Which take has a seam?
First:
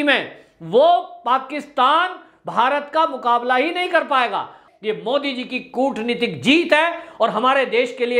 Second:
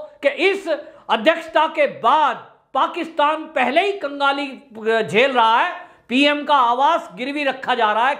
first; 1 cut; at 4.6 s

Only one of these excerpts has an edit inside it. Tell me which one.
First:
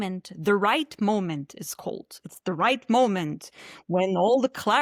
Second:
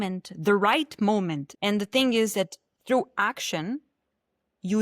second; 1 cut; at 1.5 s

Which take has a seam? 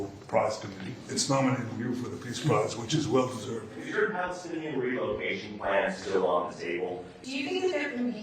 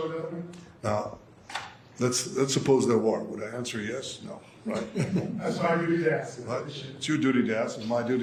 first; 3 cuts; at 1.1 s, 3.8 s, 7.1 s

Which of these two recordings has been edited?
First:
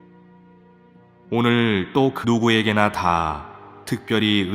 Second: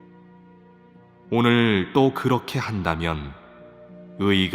second; 1 cut; at 2.2 s

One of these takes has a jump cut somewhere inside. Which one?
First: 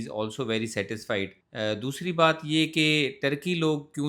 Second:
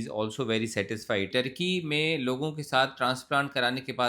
second; 1 cut; at 1.3 s

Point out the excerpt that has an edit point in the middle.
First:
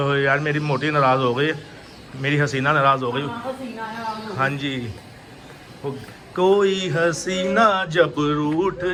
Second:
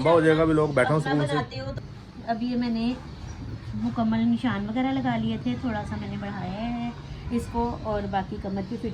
second; 1 cut; at 1.6 s

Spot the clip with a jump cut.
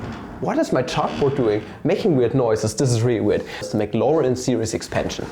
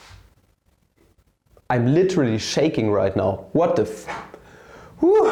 first; 1 cut; at 3.7 s

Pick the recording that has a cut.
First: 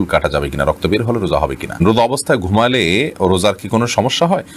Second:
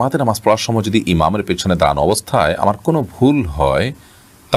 first; 1 cut; at 1.8 s

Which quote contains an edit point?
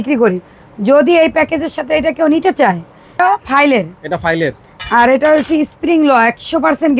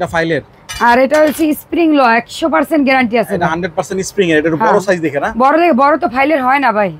first; 1 cut; at 3.2 s

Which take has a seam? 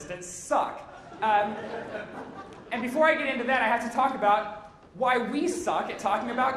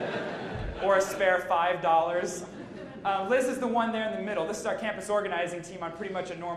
second; 1 cut; at 4.8 s

